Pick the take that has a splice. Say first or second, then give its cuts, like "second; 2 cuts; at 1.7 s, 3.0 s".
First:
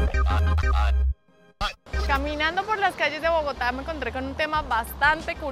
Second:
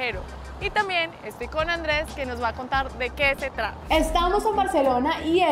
second; 1 cut; at 3.8 s